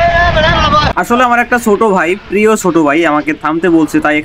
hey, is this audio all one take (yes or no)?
no